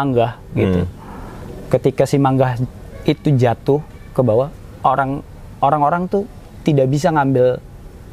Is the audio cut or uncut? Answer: uncut